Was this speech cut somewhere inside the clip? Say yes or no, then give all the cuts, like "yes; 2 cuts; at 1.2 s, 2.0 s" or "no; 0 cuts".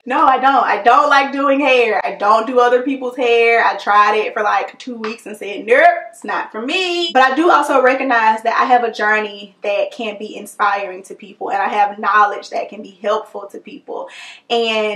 no; 0 cuts